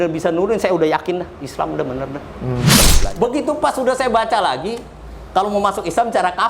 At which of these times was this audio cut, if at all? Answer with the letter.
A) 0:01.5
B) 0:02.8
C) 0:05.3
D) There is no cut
B